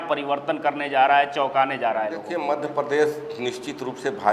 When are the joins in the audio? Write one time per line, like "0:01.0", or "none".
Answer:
0:02.2